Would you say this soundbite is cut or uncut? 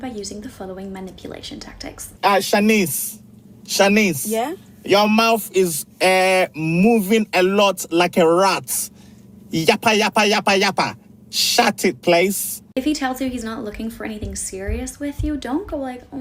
uncut